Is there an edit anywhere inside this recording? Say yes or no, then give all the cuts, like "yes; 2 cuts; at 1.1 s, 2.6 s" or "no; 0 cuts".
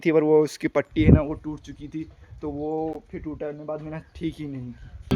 no; 0 cuts